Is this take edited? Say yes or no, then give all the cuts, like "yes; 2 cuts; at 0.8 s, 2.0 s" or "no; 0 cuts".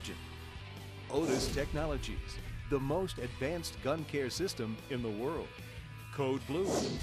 no; 0 cuts